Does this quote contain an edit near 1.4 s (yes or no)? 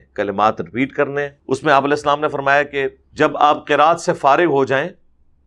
yes